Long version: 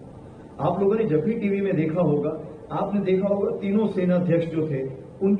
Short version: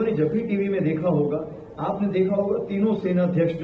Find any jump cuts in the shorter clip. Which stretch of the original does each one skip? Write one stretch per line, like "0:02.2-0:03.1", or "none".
none